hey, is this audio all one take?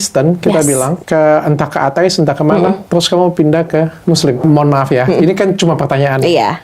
no; 2 cuts; at 1.0 s, 4.4 s

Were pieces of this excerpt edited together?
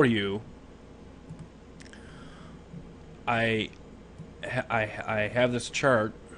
yes; 1 cut; at 3.8 s

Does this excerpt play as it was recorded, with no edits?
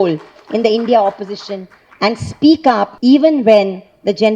no; 1 cut; at 2.9 s

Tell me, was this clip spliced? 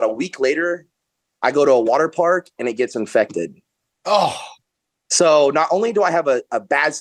no; 0 cuts

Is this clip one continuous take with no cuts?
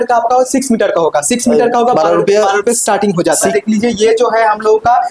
no; 1 cut; at 3.5 s

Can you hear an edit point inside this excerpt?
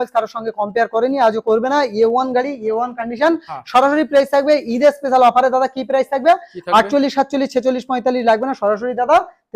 no; 0 cuts

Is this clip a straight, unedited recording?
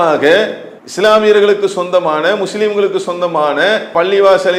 yes; 0 cuts

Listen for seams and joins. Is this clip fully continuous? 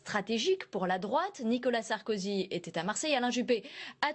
yes; 0 cuts

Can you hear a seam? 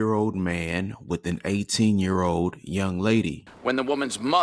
yes; 1 cut; at 3.5 s

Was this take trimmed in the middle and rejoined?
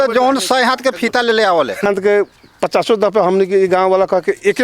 yes; 1 cut; at 1.9 s

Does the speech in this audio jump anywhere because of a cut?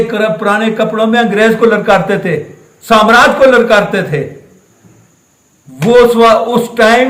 no; 0 cuts

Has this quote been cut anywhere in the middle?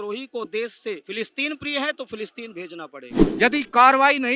yes; 1 cut; at 3.2 s

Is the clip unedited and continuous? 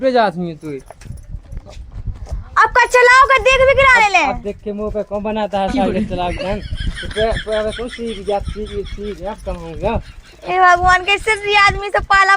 yes; 0 cuts

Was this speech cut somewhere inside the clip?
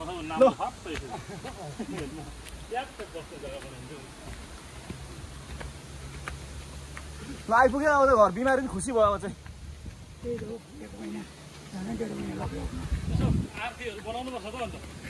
no; 0 cuts

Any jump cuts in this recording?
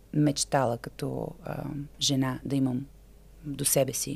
no; 0 cuts

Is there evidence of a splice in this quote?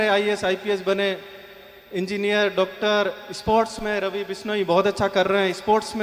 no; 0 cuts

